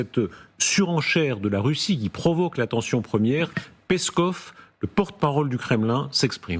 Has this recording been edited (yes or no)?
no